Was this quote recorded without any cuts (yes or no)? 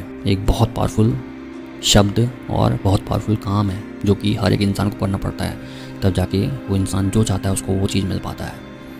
yes